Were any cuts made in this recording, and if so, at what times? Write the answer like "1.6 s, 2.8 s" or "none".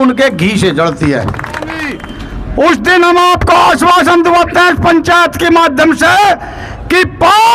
2.0 s